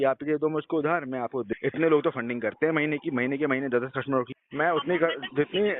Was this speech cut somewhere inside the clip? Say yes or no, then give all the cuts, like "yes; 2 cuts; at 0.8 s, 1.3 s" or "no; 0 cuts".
yes; 2 cuts; at 1.5 s, 4.4 s